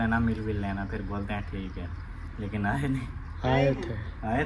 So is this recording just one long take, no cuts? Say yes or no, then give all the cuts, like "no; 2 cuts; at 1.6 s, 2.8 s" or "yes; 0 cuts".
yes; 0 cuts